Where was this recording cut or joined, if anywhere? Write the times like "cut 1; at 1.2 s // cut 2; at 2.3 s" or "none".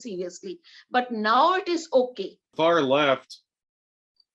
cut 1; at 2.4 s